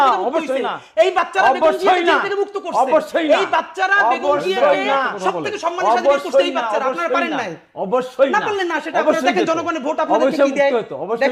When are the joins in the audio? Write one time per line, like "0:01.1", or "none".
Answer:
none